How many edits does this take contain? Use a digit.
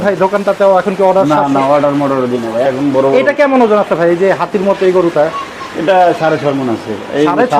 1